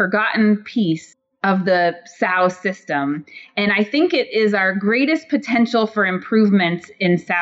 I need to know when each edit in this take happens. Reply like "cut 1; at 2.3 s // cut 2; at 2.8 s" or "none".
none